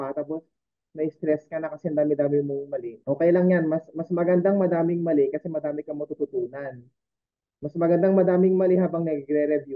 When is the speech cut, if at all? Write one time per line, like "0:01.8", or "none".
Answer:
0:02.9